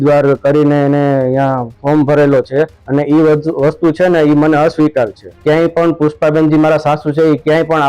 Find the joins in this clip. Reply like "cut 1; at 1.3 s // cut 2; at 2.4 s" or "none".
cut 1; at 2.8 s // cut 2; at 5.2 s